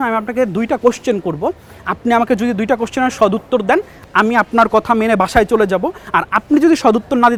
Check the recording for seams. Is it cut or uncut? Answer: uncut